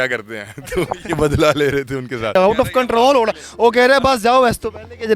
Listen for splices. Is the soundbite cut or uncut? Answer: cut